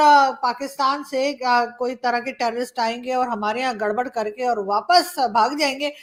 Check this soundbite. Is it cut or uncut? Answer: uncut